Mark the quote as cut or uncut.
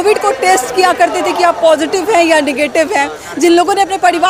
uncut